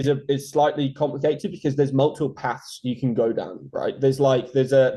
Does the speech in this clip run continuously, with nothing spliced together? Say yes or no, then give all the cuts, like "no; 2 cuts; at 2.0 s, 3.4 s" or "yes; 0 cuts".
yes; 0 cuts